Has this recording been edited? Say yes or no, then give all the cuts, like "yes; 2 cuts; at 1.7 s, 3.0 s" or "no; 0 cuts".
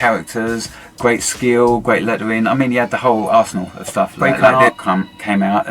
yes; 1 cut; at 4.2 s